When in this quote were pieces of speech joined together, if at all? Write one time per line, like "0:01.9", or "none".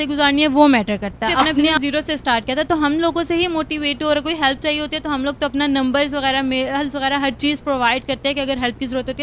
0:01.8